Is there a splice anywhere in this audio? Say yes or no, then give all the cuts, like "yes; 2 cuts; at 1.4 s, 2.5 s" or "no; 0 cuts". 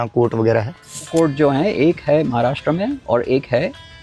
yes; 1 cut; at 1.1 s